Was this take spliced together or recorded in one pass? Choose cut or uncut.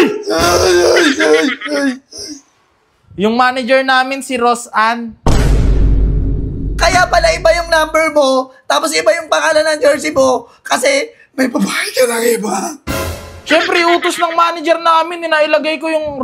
uncut